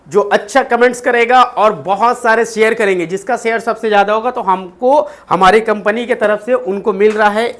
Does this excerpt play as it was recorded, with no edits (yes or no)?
yes